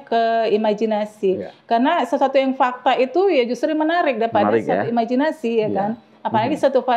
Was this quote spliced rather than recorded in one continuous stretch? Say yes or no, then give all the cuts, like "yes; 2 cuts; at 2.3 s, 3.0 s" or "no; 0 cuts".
no; 0 cuts